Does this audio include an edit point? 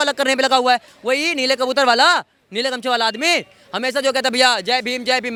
no; 0 cuts

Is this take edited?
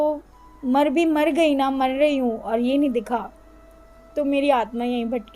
no; 0 cuts

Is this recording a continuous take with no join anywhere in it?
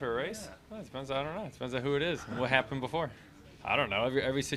yes; 0 cuts

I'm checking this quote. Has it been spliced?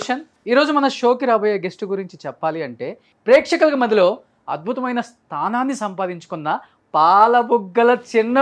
yes; 1 cut; at 3.1 s

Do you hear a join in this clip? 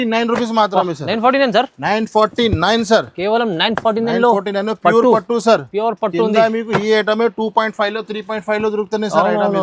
no; 0 cuts

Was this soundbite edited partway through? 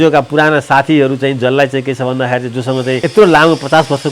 yes; 1 cut; at 3.0 s

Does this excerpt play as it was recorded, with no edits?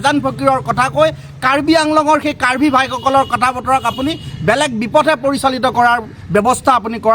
yes; 0 cuts

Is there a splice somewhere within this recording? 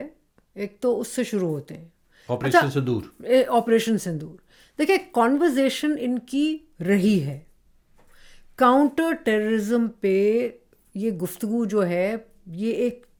no; 0 cuts

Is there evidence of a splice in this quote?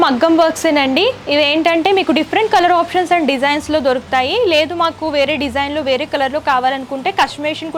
no; 0 cuts

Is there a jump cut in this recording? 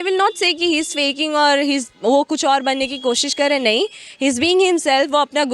no; 0 cuts

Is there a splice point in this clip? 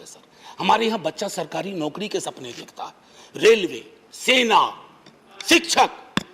no; 0 cuts

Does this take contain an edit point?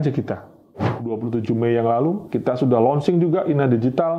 yes; 2 cuts; at 1.1 s, 2.3 s

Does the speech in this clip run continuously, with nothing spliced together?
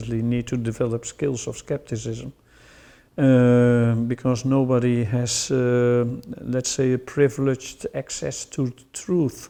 yes; 0 cuts

